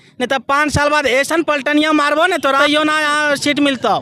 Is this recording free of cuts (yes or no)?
no